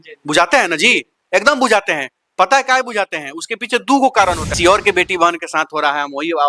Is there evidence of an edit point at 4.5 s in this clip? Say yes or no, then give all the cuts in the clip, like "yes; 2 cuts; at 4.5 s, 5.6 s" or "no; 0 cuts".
yes; 1 cut; at 4.5 s